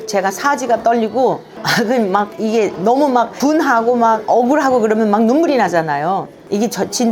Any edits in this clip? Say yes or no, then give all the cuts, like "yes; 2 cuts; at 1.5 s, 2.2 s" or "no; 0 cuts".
no; 0 cuts